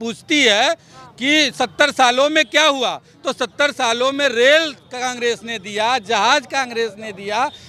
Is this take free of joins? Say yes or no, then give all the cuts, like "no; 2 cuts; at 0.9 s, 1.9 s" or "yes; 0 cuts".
yes; 0 cuts